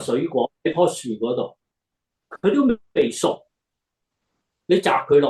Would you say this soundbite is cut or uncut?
uncut